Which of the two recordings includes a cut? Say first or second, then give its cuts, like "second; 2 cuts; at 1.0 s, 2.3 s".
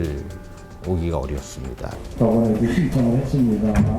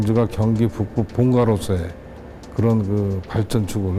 first; 1 cut; at 2.0 s